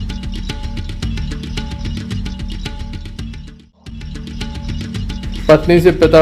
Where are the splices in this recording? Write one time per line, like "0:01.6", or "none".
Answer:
0:01.1
0:04.6